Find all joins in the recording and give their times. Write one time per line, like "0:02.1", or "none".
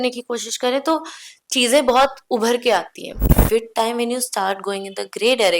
0:03.3